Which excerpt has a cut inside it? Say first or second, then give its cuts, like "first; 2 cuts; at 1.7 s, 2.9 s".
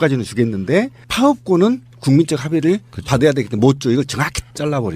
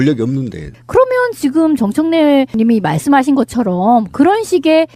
first; 1 cut; at 3.2 s